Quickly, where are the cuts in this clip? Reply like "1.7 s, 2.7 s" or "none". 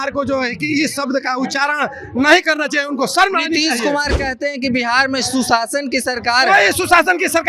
none